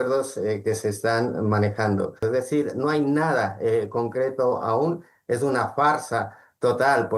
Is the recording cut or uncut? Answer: cut